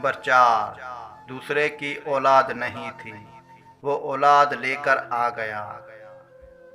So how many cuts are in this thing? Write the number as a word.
one